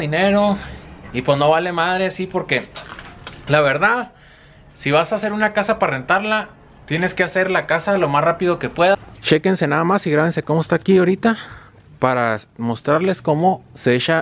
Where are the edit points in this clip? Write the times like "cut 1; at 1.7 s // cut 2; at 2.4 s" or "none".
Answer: cut 1; at 8.9 s